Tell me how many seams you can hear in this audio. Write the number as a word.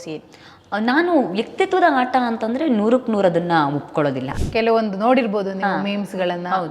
one